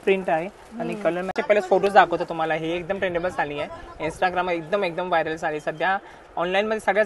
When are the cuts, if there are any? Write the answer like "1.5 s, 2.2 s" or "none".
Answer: 1.3 s